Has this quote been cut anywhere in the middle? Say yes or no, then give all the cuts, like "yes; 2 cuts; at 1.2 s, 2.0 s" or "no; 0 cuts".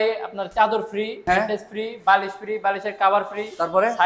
yes; 1 cut; at 1.2 s